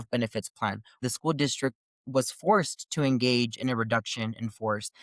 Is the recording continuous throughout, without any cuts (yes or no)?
no